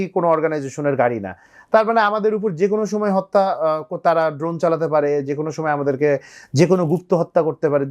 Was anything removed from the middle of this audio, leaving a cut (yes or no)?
no